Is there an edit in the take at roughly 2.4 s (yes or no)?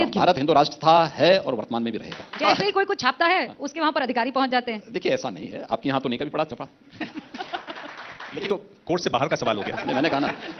yes